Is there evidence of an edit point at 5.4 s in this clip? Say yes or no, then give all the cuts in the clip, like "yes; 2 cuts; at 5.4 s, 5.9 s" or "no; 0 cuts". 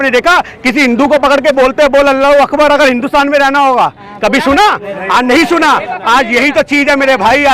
no; 0 cuts